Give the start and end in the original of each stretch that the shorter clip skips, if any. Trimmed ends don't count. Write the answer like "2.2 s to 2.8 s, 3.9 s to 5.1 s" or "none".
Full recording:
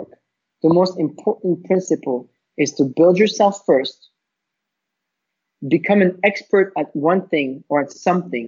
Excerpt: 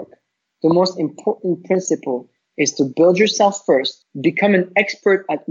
4.0 s to 5.5 s

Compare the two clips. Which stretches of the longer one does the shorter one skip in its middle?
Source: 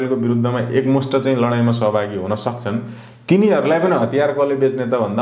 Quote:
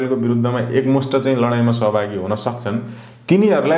none

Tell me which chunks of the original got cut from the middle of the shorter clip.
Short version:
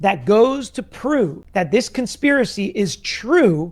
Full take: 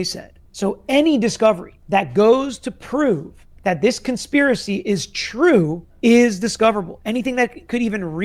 3.3 s to 3.5 s

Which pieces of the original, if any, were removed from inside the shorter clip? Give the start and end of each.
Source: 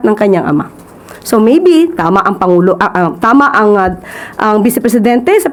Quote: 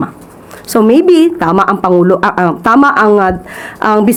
none

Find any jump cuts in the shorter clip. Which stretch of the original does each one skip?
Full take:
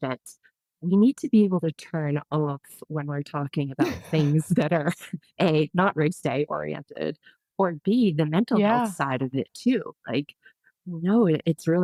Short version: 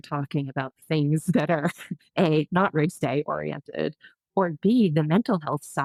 none

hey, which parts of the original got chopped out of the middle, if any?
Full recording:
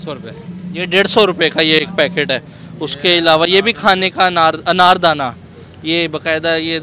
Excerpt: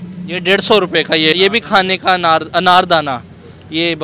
1.8 s to 3.5 s

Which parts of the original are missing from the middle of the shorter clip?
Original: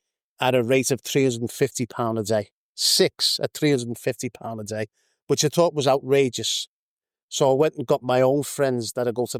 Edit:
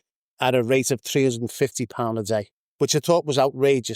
2.6 s to 5.1 s

